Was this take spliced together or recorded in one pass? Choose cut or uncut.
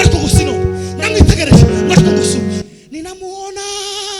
cut